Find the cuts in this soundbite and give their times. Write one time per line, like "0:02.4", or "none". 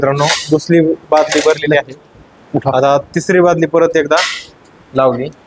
none